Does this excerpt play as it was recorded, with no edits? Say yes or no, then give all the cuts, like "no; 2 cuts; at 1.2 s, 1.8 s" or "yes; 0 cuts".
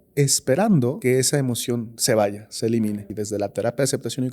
no; 2 cuts; at 1.0 s, 3.2 s